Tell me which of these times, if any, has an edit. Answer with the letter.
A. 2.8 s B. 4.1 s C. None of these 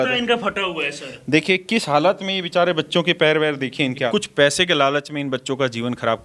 B